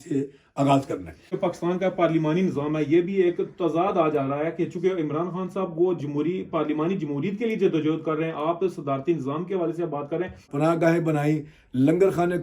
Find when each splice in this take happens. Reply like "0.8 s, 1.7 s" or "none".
1.3 s, 10.5 s